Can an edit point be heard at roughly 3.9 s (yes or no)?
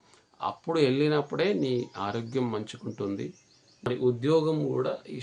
yes